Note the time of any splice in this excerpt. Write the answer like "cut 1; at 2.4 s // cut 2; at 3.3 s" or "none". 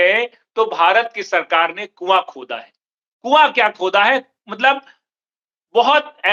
none